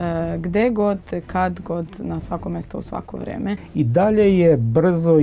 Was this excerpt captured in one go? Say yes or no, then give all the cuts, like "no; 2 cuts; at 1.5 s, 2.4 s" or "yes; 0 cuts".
no; 1 cut; at 3.6 s